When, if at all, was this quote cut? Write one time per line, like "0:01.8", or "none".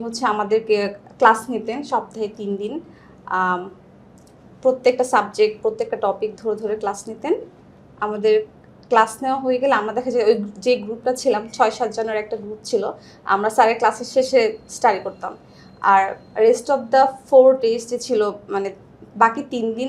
none

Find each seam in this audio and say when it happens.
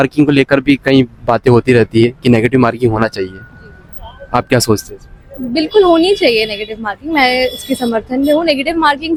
none

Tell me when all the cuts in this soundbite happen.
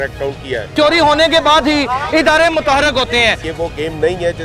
0:00.7
0:03.4

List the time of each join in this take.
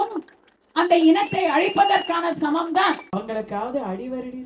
0:03.1

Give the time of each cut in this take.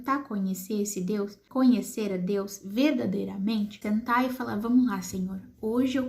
0:01.4
0:03.8

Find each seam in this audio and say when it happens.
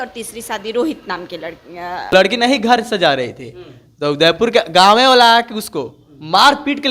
0:02.1

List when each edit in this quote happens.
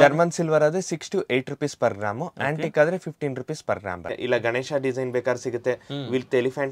0:04.2

